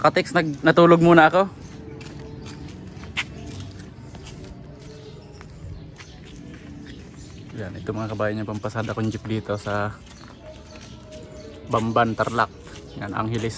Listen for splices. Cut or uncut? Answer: uncut